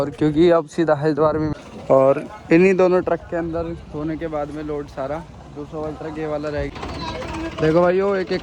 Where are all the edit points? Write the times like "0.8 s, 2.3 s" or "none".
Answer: 1.5 s, 6.7 s